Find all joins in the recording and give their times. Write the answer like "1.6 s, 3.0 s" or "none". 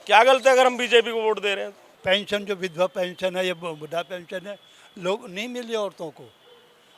1.7 s